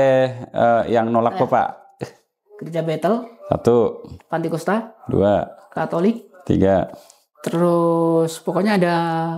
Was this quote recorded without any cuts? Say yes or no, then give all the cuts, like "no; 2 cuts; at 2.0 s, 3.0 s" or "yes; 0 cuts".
yes; 0 cuts